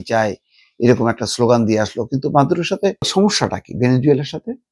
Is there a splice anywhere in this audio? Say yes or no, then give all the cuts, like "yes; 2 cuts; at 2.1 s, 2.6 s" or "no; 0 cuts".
yes; 1 cut; at 3.1 s